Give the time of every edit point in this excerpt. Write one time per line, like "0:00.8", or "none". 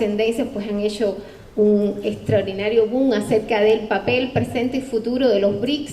0:02.7